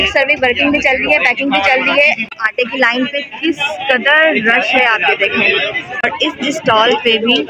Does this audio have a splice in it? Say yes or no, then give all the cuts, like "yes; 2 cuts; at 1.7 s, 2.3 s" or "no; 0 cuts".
yes; 2 cuts; at 2.3 s, 6.0 s